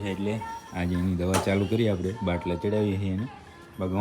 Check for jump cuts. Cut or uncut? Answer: uncut